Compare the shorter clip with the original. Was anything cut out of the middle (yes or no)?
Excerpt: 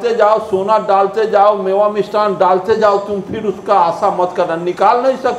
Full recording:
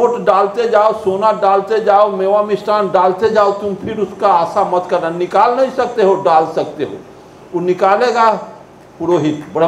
no